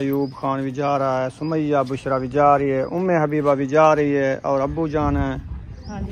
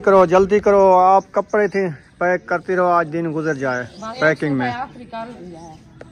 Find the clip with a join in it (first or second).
second